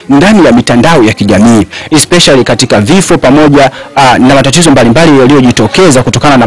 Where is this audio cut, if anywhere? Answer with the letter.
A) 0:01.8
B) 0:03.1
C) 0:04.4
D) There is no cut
A